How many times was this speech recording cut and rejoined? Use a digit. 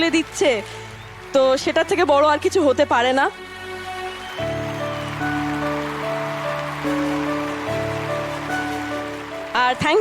0